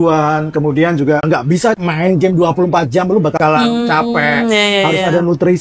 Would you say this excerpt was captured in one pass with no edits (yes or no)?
no